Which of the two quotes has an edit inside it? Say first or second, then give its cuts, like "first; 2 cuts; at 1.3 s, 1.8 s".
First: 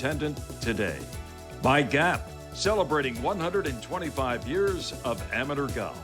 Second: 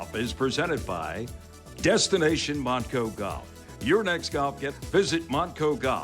second; 1 cut; at 4.6 s